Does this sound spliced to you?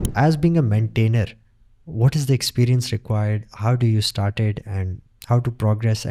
no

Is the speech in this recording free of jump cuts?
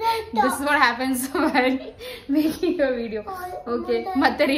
yes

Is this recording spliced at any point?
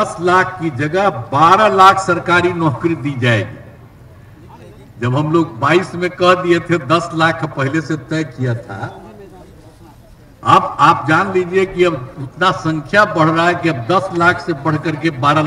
no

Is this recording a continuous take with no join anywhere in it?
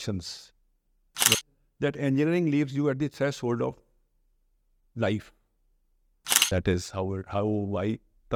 no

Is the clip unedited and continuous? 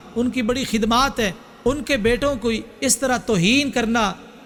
yes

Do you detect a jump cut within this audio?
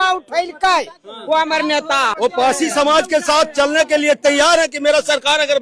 yes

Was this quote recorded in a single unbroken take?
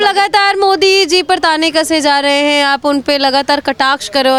yes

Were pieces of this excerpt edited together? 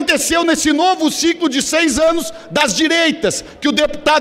no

